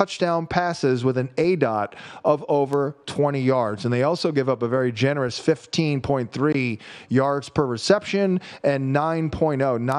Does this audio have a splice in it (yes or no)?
no